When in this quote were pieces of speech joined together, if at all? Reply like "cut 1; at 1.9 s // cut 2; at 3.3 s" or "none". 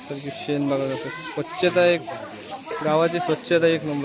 none